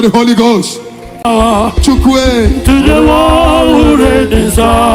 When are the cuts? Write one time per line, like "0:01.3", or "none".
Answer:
0:01.3